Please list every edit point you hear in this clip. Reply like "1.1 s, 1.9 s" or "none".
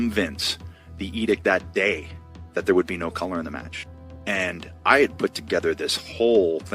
none